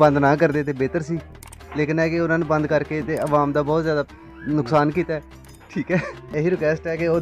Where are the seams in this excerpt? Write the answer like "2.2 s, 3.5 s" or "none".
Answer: 6.3 s